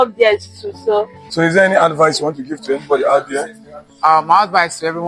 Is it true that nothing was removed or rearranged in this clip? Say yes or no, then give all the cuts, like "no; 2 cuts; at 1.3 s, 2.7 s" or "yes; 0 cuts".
no; 1 cut; at 1.2 s